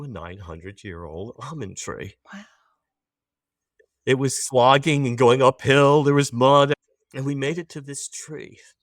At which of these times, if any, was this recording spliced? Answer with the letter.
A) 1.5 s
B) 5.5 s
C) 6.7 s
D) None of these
C